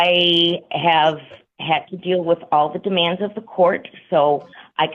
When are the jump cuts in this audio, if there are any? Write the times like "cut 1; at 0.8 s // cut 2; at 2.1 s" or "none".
none